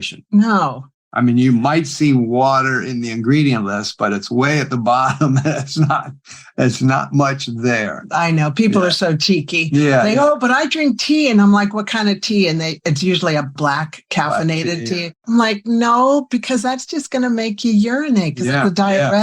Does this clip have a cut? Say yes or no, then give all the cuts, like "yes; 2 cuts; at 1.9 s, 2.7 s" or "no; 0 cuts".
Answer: yes; 2 cuts; at 13.5 s, 15.1 s